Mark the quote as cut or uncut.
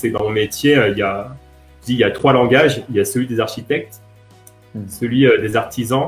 uncut